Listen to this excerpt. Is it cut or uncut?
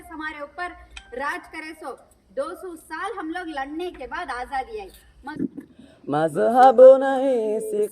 cut